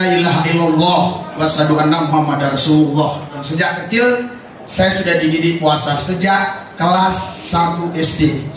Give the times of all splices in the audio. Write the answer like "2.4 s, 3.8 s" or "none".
3.4 s